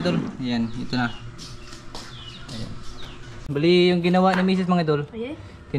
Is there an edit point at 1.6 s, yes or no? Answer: no